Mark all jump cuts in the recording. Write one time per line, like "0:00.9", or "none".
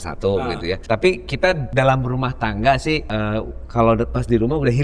0:00.8
0:01.6
0:03.1